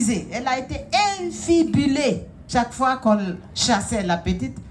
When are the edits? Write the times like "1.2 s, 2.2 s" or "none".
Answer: 2.4 s